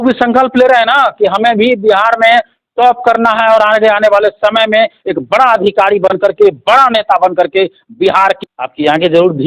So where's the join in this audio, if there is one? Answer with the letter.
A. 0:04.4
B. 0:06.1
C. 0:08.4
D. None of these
C